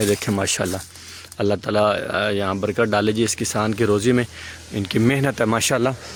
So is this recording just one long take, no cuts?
yes; 0 cuts

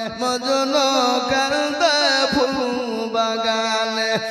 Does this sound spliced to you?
no; 0 cuts

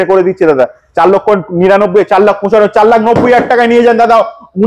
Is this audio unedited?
yes; 0 cuts

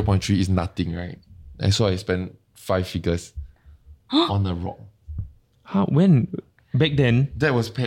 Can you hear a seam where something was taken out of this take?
no; 0 cuts

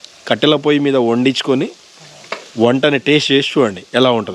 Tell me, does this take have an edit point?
no; 0 cuts

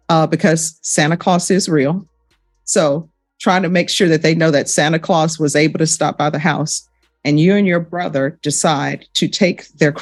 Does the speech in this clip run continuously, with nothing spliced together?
yes; 0 cuts

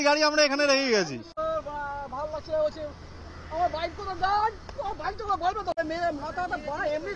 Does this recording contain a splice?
yes; 2 cuts; at 1.2 s, 5.7 s

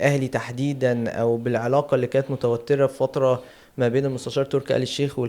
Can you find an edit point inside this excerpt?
no; 0 cuts

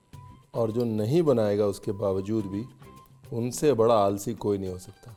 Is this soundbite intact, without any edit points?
yes; 0 cuts

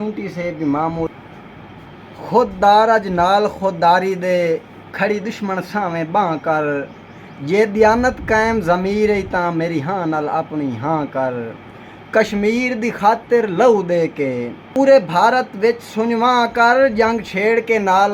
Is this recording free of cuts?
no; 2 cuts; at 1.1 s, 14.8 s

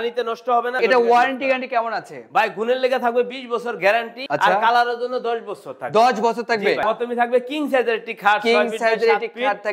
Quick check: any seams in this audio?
yes; 3 cuts; at 0.8 s, 4.2 s, 6.8 s

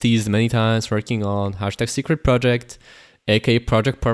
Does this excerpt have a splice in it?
no; 0 cuts

